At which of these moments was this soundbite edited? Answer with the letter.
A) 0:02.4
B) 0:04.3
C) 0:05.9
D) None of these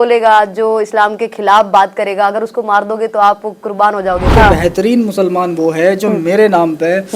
B